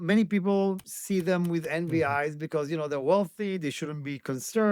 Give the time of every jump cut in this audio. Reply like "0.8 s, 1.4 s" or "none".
0.9 s